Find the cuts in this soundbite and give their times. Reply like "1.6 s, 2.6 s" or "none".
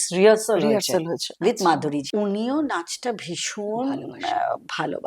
2.0 s